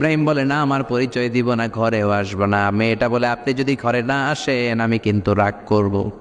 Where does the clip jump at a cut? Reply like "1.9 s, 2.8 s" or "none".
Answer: none